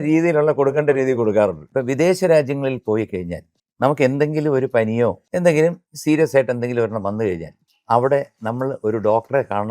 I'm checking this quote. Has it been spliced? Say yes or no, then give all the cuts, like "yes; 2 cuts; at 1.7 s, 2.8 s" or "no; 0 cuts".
yes; 3 cuts; at 1.6 s, 5.2 s, 5.9 s